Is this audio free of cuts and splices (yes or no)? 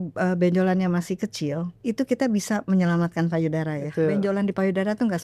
no